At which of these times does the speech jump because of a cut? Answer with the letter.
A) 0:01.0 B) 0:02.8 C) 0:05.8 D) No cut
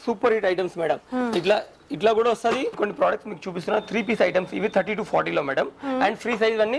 B